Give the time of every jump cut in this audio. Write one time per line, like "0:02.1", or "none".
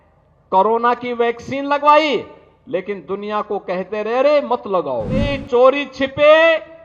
0:05.4

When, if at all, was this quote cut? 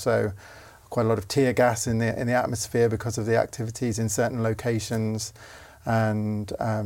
none

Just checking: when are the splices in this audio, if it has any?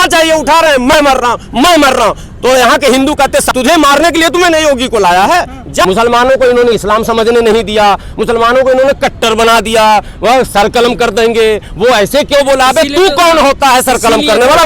0:03.5
0:05.9

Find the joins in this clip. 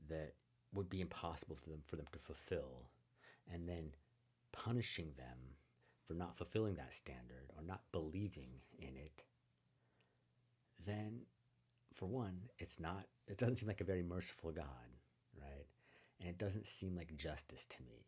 none

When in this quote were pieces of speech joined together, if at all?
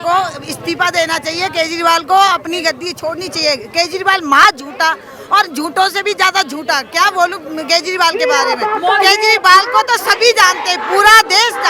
none

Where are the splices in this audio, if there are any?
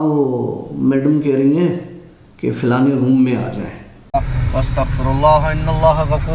0:04.1

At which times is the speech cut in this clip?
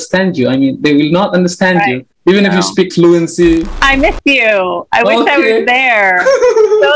0:03.7

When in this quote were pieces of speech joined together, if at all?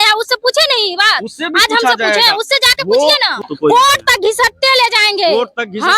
0:03.4

